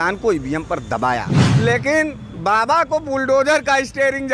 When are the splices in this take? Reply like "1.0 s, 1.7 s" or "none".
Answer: 1.3 s